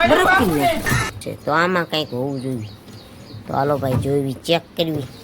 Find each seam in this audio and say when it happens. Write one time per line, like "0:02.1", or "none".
0:01.2